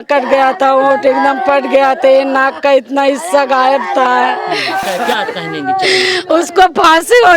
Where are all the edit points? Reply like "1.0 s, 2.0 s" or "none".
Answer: 4.8 s